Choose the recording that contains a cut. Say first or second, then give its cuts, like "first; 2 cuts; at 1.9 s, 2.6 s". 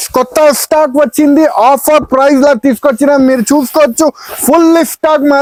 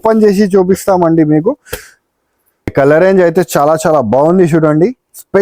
second; 1 cut; at 2.7 s